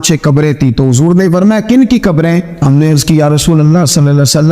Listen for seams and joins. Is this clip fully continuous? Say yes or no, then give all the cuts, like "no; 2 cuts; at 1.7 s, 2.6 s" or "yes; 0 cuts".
no; 1 cut; at 2.2 s